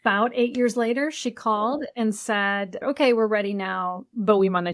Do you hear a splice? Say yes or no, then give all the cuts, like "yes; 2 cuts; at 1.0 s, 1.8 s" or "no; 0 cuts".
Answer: yes; 1 cut; at 2.8 s